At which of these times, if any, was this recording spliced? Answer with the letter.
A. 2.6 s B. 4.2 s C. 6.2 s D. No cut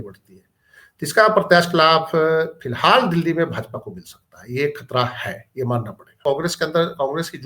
C